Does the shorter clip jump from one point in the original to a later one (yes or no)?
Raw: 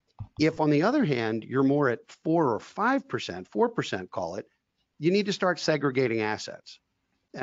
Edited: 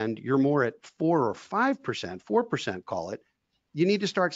no